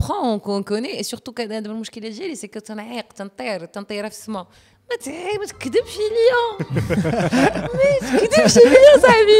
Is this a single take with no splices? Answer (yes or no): yes